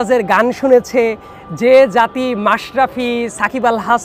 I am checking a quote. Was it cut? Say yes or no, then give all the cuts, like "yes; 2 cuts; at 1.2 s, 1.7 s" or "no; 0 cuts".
no; 0 cuts